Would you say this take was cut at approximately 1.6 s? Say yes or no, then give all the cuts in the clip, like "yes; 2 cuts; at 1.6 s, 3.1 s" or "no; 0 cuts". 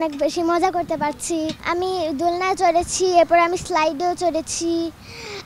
no; 0 cuts